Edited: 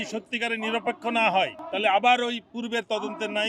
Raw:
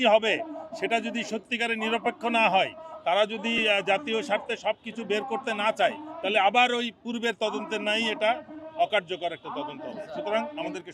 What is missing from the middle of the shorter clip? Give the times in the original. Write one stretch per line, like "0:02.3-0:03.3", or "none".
0:02.8-0:06.1